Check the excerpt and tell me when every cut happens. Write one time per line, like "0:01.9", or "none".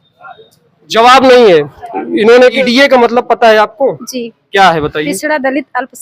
0:02.6